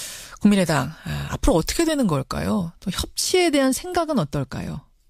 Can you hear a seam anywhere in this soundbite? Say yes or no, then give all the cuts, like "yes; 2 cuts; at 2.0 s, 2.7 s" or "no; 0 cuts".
no; 0 cuts